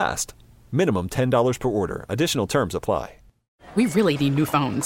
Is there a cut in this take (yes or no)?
yes